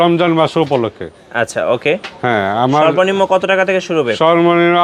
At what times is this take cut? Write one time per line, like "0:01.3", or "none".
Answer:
none